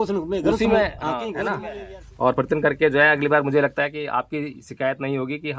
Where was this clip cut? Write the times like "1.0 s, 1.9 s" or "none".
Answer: 1.6 s